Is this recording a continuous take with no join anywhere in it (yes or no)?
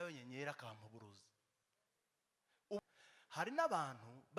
no